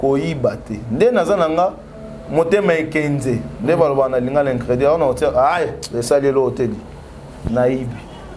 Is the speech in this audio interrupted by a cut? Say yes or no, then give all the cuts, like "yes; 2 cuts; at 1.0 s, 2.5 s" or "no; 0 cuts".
no; 0 cuts